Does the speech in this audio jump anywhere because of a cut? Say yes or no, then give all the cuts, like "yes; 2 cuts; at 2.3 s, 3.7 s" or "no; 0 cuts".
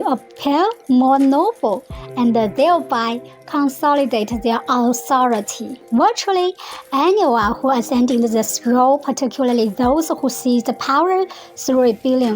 yes; 1 cut; at 5.8 s